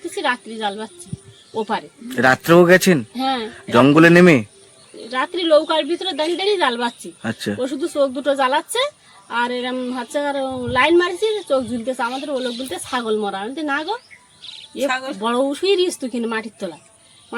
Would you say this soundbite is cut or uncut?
uncut